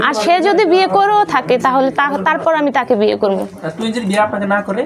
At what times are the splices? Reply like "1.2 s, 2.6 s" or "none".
none